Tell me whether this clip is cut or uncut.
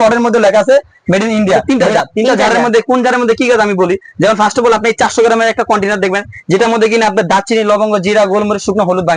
cut